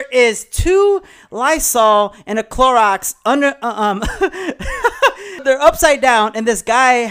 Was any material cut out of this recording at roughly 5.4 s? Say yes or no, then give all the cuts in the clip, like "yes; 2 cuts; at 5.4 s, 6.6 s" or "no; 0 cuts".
yes; 1 cut; at 5.4 s